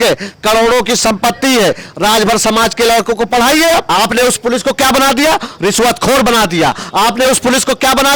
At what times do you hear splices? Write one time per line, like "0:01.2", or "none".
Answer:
0:03.9